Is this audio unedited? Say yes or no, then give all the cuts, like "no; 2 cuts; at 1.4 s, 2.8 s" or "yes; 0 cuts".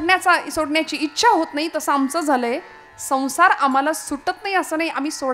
yes; 0 cuts